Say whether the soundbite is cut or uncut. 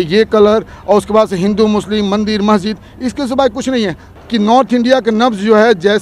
cut